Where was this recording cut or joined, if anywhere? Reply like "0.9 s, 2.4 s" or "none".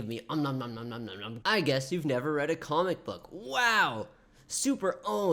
1.3 s